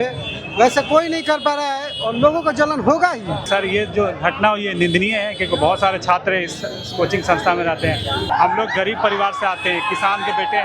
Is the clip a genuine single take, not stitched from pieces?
no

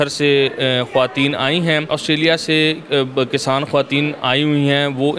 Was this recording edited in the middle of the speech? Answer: yes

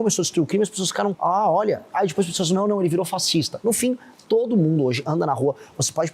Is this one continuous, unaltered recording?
no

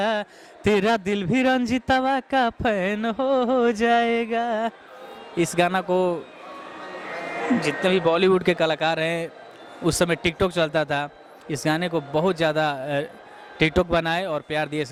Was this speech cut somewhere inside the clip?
no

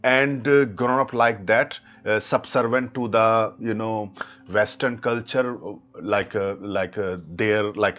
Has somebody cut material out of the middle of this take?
no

